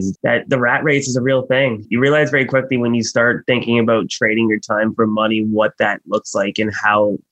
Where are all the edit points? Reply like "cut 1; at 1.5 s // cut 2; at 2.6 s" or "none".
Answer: cut 1; at 1.8 s